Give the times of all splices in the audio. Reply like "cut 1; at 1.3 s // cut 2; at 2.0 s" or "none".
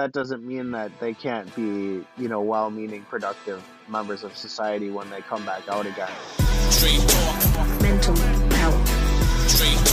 cut 1; at 6.2 s